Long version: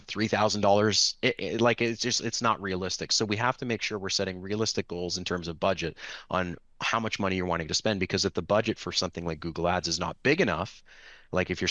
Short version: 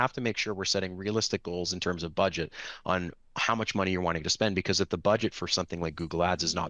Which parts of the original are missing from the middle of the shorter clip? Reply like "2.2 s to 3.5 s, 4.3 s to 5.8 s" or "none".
none